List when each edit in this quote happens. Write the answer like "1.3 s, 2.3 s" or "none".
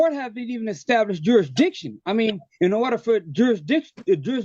none